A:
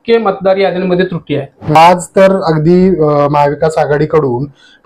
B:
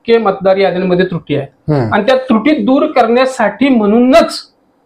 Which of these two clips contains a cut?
A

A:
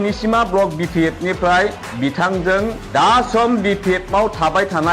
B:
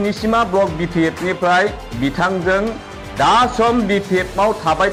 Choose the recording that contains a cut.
A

